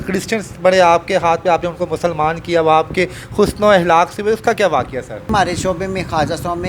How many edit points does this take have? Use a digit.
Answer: 1